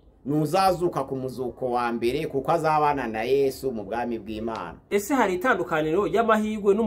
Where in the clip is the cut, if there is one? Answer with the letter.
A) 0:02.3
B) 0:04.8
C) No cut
B